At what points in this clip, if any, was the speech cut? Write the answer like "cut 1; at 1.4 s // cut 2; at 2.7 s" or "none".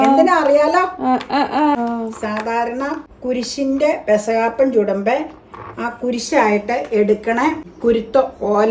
cut 1; at 1.8 s // cut 2; at 3.1 s // cut 3; at 7.7 s

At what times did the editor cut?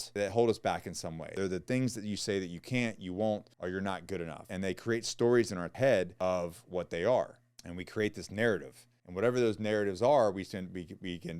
cut 1; at 1.3 s // cut 2; at 4.4 s // cut 3; at 5.7 s

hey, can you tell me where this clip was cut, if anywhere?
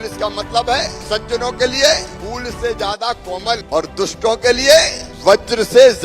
cut 1; at 1.0 s // cut 2; at 2.1 s // cut 3; at 3.6 s // cut 4; at 5.0 s

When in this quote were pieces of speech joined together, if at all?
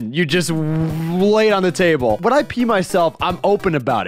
cut 1; at 2.1 s

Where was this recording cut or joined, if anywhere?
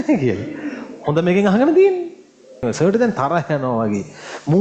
cut 1; at 2.6 s

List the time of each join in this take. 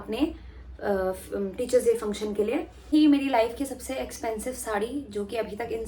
cut 1; at 2.9 s

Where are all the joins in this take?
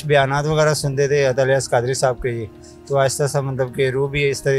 none

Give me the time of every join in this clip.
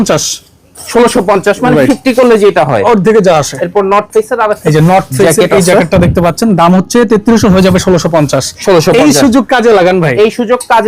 none

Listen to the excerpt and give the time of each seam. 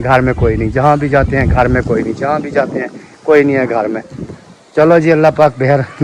none

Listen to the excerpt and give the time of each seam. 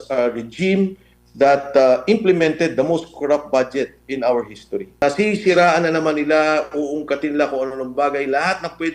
cut 1; at 5.0 s

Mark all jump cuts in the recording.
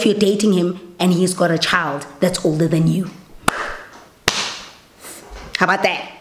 none

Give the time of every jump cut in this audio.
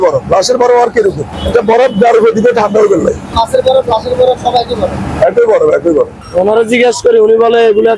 cut 1; at 1.3 s // cut 2; at 3.3 s // cut 3; at 6.1 s

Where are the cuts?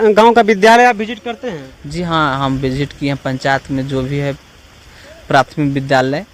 none

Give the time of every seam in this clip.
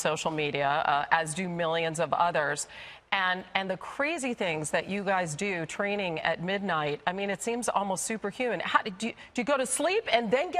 cut 1; at 7.1 s

